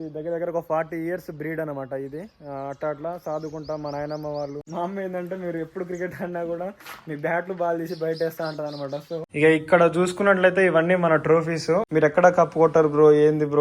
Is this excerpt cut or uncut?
cut